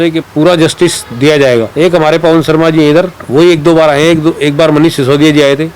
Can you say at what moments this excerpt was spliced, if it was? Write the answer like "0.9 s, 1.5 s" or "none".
none